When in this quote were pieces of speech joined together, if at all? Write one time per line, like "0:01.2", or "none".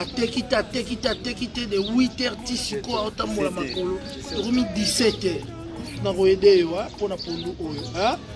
0:04.3
0:05.9